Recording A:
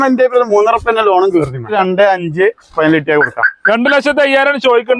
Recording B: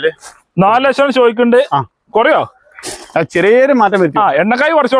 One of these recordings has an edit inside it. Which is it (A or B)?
A